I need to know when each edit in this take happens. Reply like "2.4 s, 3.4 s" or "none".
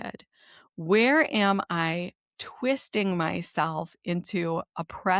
none